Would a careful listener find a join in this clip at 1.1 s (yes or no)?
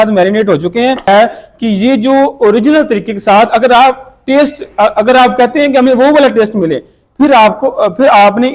yes